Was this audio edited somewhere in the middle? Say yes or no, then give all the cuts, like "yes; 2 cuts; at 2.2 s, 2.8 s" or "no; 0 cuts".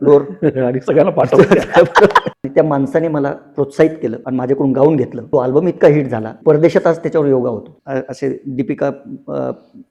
yes; 5 cuts; at 2.3 s, 4.2 s, 5.2 s, 6.2 s, 7.7 s